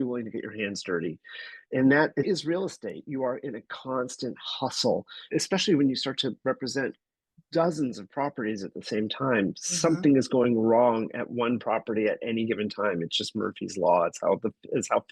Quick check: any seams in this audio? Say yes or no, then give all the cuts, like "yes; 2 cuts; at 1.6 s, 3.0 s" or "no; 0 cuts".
yes; 2 cuts; at 2.3 s, 5.3 s